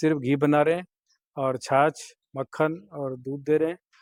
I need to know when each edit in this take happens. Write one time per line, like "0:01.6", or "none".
none